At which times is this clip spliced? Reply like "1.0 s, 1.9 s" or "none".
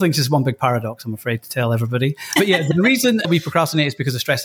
3.2 s